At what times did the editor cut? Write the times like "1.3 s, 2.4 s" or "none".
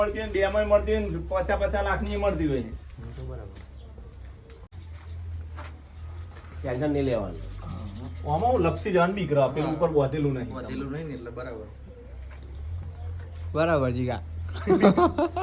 none